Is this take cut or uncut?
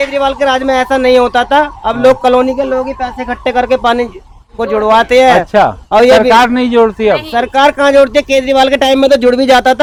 uncut